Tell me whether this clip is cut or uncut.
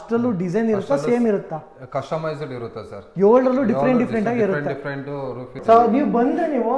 cut